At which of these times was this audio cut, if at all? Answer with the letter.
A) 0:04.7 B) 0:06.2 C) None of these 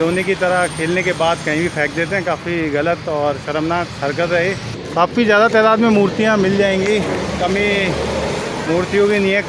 A